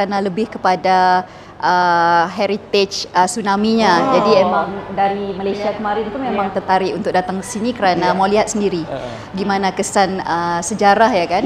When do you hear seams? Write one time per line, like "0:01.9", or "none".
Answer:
none